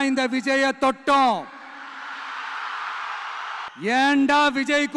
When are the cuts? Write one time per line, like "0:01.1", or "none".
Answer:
0:03.7

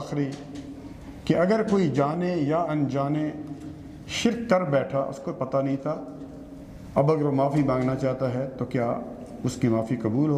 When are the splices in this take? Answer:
none

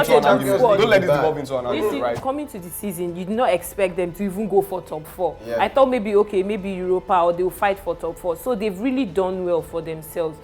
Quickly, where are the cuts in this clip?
0:02.2

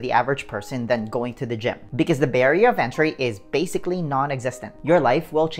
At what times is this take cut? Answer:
0:01.8
0:04.7

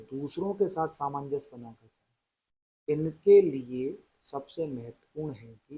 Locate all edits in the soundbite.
none

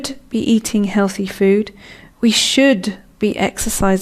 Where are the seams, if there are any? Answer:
0:01.5

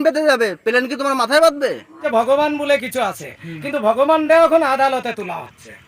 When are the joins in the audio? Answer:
0:01.9

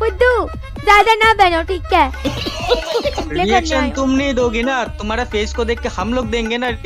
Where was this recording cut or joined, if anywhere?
0:03.2

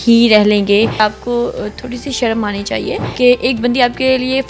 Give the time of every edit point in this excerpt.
0:01.0
0:03.1

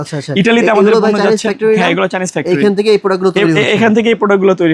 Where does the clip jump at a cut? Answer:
none

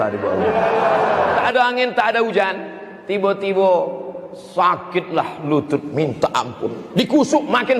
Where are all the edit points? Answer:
0:01.4

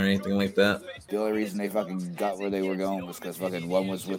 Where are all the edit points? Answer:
0:00.9

